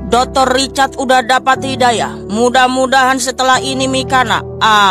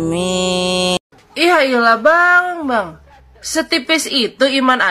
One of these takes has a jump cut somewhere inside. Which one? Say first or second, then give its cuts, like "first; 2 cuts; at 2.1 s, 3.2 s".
second; 1 cut; at 1.0 s